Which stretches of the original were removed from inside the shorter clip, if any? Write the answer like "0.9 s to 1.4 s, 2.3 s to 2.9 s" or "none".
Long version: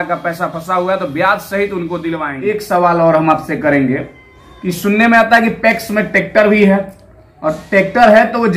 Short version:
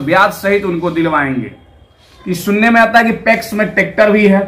2.6 s to 3.9 s